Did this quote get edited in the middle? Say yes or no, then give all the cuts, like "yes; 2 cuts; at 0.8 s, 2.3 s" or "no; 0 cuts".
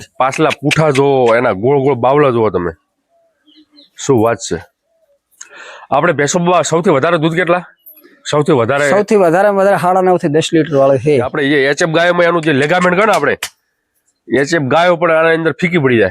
yes; 1 cut; at 11.3 s